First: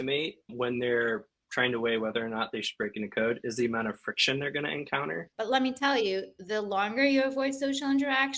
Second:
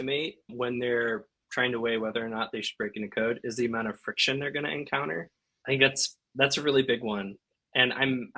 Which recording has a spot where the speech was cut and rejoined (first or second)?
first